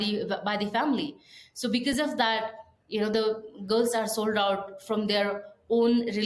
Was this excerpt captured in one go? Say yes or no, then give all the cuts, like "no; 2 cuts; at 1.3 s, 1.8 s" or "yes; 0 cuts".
yes; 0 cuts